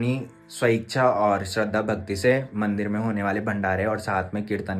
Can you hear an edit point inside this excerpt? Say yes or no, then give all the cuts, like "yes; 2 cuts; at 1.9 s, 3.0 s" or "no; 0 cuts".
no; 0 cuts